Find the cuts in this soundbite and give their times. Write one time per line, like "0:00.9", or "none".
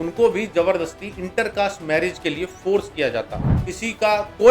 0:03.4

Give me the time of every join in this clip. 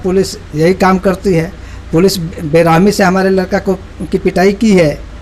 none

